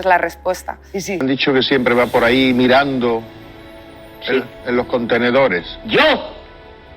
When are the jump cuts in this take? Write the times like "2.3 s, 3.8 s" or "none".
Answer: 1.2 s